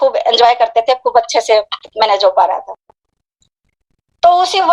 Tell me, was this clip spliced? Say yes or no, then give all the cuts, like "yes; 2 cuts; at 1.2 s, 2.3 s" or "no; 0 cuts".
no; 0 cuts